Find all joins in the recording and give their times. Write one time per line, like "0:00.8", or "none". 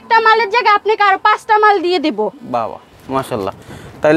none